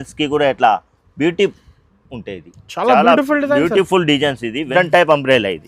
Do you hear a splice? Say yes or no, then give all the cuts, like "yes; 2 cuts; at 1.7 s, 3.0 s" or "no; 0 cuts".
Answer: yes; 1 cut; at 4.7 s